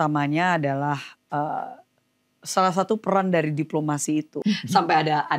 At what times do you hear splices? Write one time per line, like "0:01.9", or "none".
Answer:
0:04.4

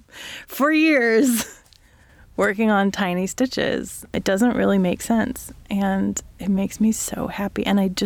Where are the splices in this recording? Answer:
none

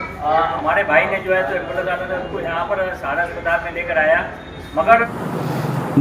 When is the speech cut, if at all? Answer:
0:05.1

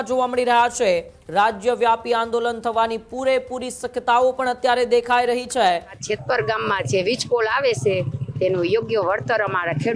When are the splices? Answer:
0:01.2
0:06.0

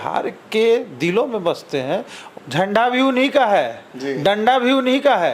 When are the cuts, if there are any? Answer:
0:02.2

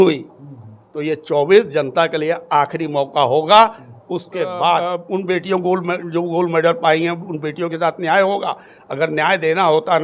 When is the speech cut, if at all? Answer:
0:05.0

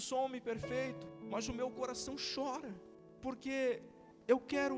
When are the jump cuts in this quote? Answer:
0:01.1
0:02.5

